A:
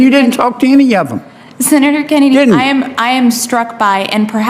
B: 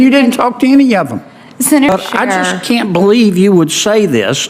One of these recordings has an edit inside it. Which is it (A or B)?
B